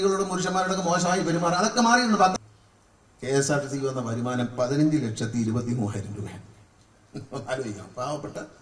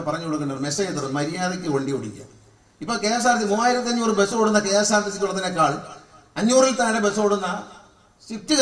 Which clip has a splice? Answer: first; 1 cut; at 2.4 s

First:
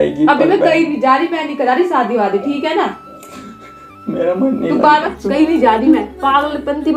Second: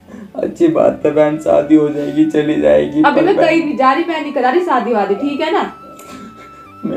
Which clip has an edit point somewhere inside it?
first; 1 cut; at 5.1 s

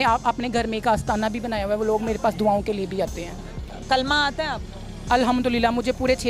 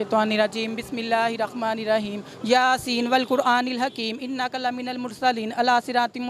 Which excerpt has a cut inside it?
first; 1 cut; at 3.6 s

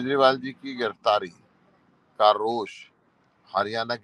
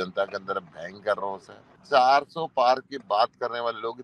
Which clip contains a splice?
second; 1 cut; at 1.8 s

